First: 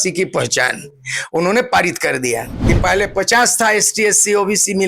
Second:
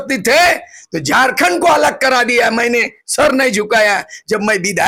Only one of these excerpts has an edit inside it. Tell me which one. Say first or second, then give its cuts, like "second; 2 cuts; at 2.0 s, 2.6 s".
first; 1 cut; at 2.5 s